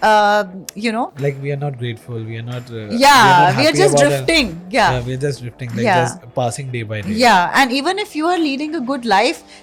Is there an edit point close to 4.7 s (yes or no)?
no